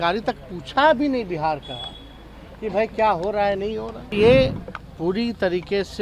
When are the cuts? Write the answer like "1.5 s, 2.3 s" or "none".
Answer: 4.1 s